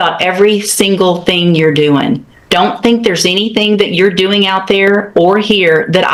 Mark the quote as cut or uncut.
uncut